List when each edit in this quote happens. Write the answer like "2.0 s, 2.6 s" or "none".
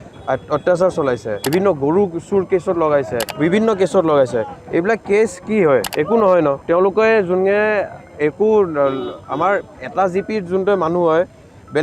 1.3 s, 3.2 s, 5.9 s, 6.6 s